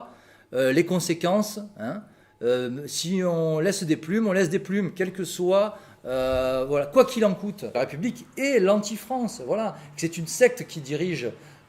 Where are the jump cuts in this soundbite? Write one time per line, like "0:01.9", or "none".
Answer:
0:07.8